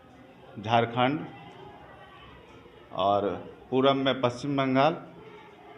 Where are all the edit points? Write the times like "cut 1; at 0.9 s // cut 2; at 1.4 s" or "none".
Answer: none